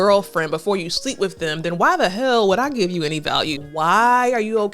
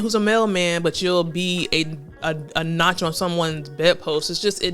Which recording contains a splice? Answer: first; 1 cut; at 3.6 s

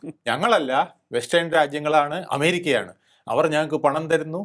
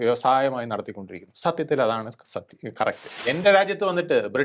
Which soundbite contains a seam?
second; 1 cut; at 3.1 s

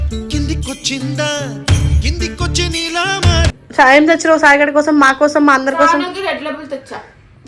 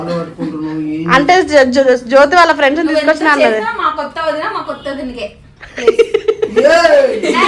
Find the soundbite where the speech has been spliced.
first; 1 cut; at 3.6 s

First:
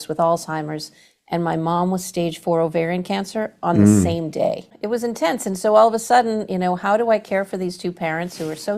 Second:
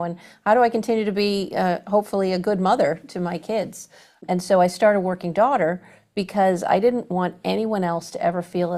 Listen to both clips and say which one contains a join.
first; 1 cut; at 4.7 s

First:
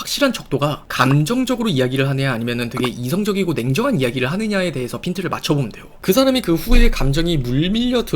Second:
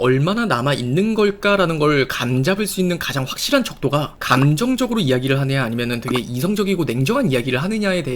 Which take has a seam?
first; 1 cut; at 5.8 s

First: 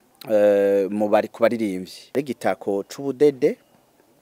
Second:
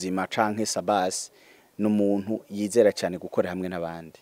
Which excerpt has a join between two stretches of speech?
first; 1 cut; at 2.0 s

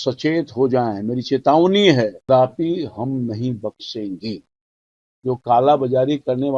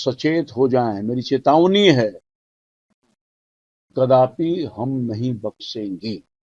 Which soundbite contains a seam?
first; 1 cut; at 2.3 s

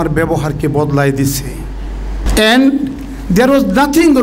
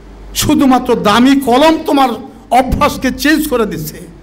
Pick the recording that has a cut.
first; 1 cut; at 2.2 s

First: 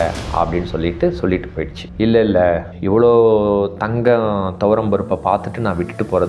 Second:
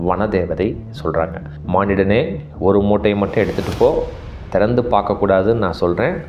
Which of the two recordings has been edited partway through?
second; 1 cut; at 1.5 s

